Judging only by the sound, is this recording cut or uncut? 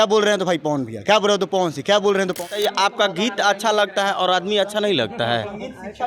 cut